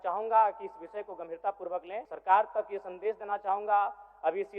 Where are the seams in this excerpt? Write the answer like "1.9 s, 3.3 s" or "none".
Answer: 2.1 s